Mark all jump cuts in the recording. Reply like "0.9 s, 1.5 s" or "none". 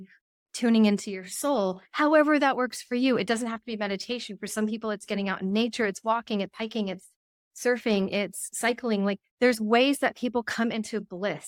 none